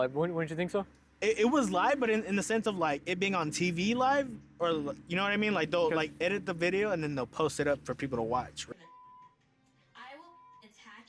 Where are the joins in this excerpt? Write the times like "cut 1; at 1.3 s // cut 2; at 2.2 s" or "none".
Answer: cut 1; at 8.6 s